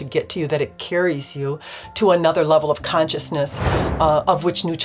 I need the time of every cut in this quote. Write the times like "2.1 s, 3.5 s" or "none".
none

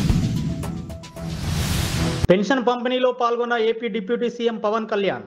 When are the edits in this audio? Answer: 2.2 s

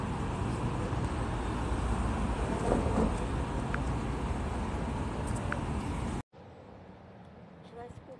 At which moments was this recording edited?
6.3 s

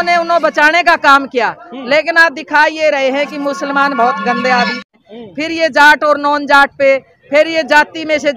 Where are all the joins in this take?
4.9 s

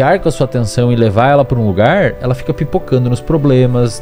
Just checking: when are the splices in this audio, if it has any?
none

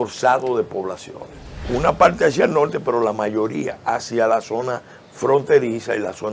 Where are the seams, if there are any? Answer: 1.6 s

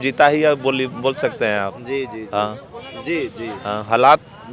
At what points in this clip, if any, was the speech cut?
none

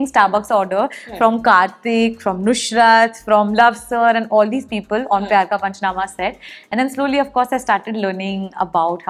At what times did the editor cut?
none

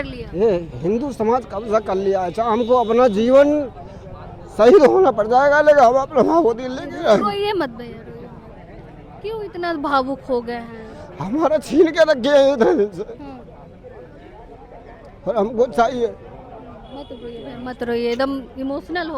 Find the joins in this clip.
none

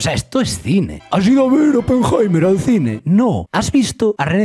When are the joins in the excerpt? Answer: 0.9 s

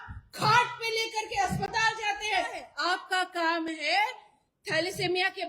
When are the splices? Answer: 2.6 s

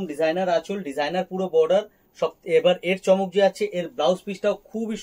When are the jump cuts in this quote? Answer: none

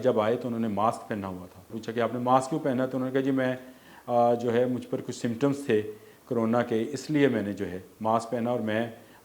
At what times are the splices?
1.8 s

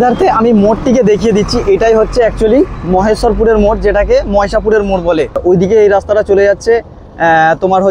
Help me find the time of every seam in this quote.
5.4 s

